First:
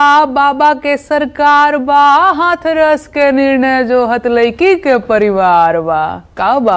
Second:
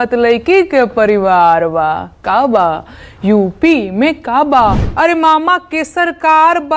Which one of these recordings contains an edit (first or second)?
second